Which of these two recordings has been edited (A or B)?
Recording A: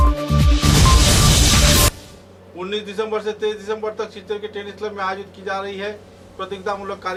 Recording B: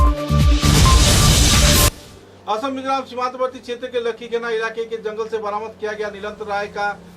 B